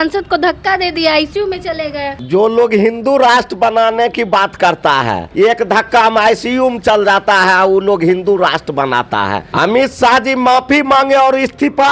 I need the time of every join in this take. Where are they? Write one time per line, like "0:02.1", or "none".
0:02.2
0:05.2
0:09.5